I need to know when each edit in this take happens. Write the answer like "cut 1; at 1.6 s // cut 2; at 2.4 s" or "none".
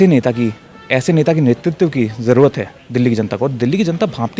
none